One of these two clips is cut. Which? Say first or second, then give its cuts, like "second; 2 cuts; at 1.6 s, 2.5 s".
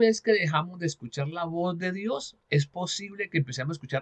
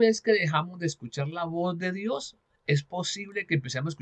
first; 1 cut; at 2.3 s